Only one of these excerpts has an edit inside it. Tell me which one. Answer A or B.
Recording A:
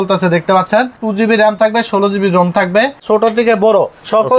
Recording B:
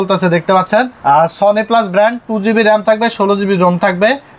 A